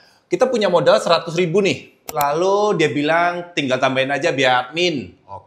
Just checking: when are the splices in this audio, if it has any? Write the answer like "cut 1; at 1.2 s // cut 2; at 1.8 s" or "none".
cut 1; at 2.1 s